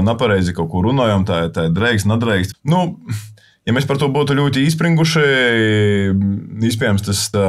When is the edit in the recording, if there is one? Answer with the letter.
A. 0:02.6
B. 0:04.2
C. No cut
C